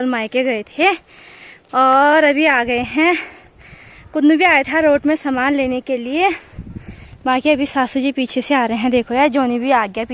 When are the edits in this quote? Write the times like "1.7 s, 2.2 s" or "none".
none